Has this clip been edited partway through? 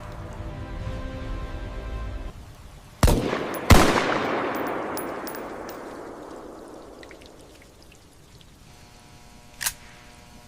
yes; 1 cut; at 5.3 s

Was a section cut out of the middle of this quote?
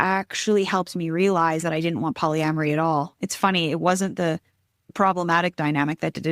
yes; 1 cut; at 4.9 s

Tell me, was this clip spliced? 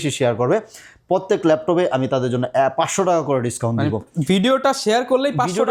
no; 0 cuts

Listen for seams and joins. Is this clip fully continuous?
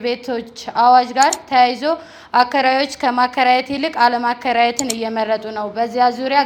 yes; 0 cuts

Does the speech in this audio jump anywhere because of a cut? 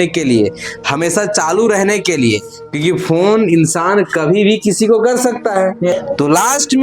yes; 1 cut; at 5.9 s

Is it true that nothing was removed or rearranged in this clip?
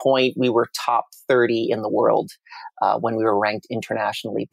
yes; 0 cuts

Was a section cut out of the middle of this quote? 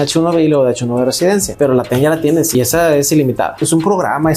yes; 3 cuts; at 1.5 s, 2.5 s, 3.6 s

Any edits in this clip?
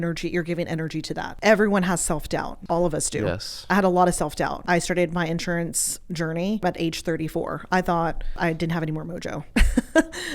yes; 5 cuts; at 1.3 s, 2.5 s, 4.6 s, 6.6 s, 8.4 s

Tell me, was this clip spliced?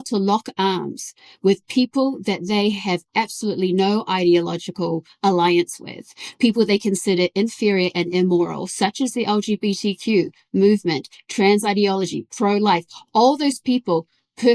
no; 0 cuts

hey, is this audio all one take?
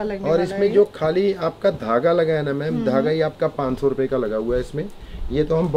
yes; 0 cuts

